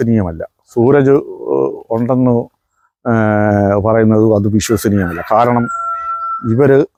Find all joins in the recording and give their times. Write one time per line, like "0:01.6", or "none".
none